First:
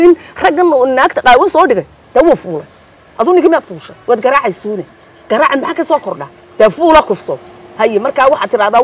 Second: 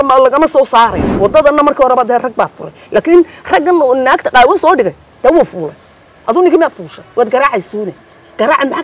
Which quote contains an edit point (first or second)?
second